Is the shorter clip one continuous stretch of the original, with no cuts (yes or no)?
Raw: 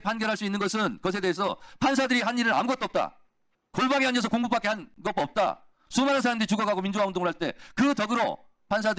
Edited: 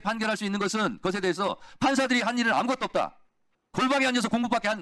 yes